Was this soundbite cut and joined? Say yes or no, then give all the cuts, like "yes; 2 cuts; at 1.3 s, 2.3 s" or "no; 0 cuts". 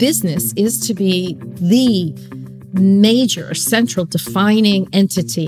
yes; 1 cut; at 1.5 s